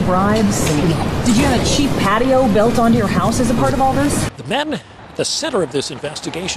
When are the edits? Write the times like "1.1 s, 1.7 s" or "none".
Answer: none

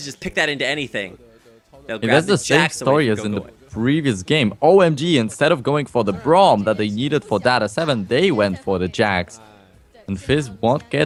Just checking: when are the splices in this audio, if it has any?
none

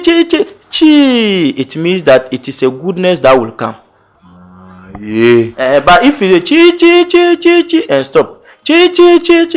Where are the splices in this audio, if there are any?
none

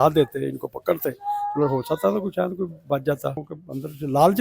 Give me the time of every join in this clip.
3.4 s

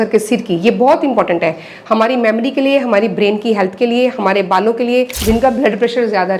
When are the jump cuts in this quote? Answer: 5.2 s

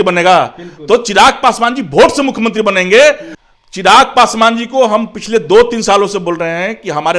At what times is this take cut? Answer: 3.3 s

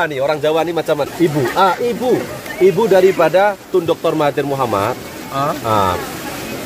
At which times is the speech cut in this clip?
1.1 s

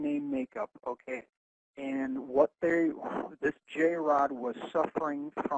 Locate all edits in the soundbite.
none

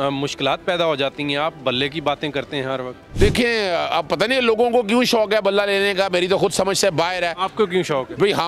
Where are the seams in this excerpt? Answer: none

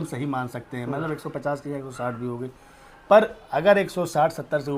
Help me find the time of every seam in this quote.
none

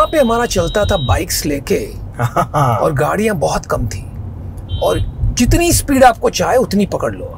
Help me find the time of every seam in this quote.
none

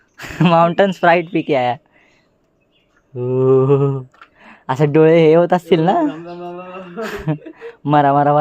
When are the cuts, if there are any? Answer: 2.7 s

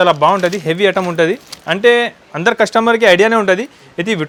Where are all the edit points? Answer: none

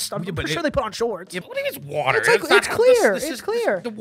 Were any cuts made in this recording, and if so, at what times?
1.4 s

